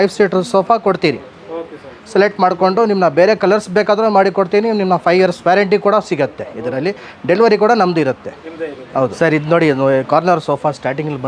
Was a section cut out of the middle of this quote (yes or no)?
no